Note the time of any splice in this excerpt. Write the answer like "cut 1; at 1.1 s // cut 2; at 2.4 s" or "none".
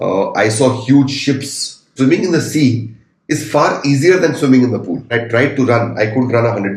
cut 1; at 1.9 s // cut 2; at 5.1 s